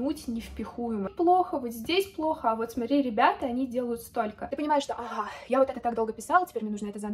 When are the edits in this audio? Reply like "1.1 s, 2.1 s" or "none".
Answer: 1.1 s, 4.4 s